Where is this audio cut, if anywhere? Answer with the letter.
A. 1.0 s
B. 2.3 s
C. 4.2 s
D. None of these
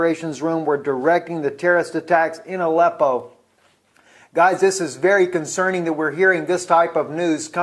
D